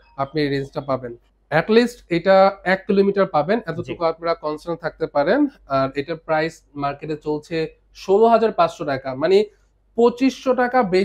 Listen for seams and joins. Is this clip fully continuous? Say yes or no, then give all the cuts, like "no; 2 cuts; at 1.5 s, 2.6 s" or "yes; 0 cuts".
yes; 0 cuts